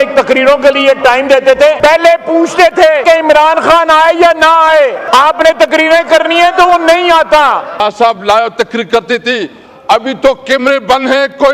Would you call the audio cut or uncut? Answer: cut